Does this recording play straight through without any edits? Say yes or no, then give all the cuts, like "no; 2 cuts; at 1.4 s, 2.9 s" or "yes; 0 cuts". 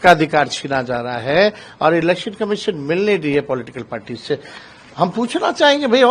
yes; 0 cuts